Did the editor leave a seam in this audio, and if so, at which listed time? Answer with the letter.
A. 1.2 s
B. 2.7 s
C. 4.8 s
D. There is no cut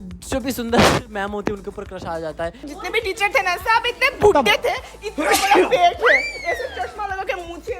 B